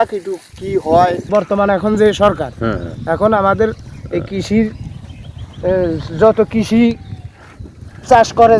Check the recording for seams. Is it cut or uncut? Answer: cut